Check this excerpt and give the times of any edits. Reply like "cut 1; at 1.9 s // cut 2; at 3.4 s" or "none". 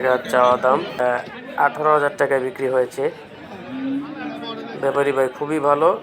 cut 1; at 1.0 s